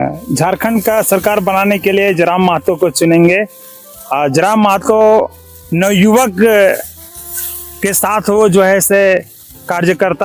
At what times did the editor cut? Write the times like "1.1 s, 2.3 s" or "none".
none